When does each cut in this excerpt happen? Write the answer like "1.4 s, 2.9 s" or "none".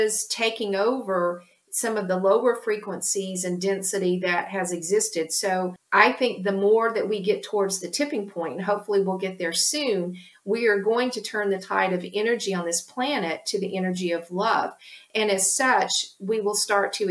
5.8 s